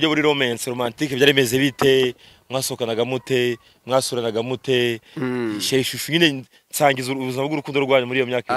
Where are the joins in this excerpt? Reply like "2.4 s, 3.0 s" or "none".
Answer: none